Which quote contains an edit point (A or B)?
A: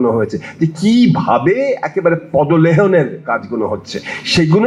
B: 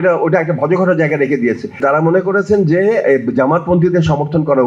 B